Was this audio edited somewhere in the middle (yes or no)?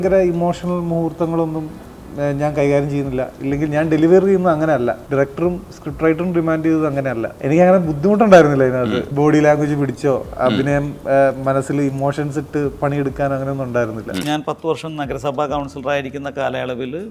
yes